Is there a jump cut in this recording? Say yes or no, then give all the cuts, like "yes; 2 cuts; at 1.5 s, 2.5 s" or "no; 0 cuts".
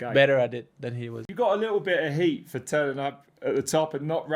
yes; 1 cut; at 1.1 s